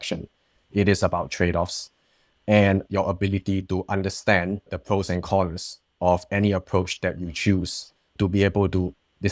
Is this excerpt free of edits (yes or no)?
no